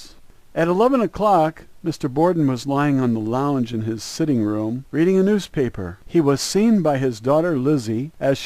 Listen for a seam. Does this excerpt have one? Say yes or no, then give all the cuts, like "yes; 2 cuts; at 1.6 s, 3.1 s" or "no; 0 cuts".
yes; 1 cut; at 6.6 s